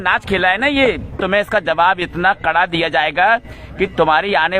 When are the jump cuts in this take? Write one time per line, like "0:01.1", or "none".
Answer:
0:01.2